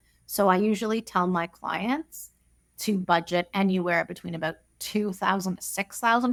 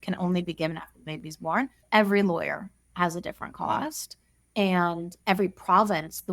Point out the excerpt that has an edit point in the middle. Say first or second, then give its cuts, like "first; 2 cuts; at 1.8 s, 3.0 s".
second; 1 cut; at 1.8 s